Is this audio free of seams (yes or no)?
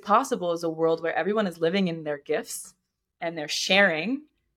yes